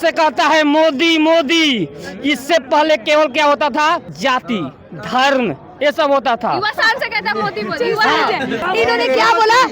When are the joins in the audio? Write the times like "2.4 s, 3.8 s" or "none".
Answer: 4.1 s, 8.6 s